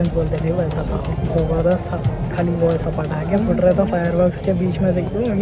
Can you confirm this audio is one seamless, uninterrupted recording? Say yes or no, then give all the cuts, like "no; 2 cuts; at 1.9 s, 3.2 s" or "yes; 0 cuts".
yes; 0 cuts